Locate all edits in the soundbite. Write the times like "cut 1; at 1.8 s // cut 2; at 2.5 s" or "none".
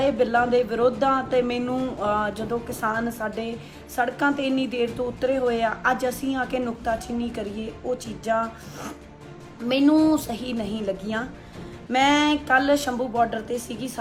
none